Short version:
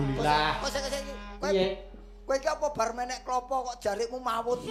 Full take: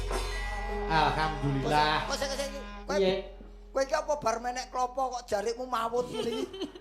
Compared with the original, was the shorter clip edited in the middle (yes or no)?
no